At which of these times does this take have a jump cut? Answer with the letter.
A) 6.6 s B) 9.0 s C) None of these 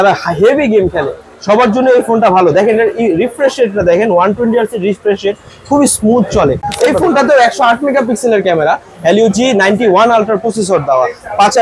A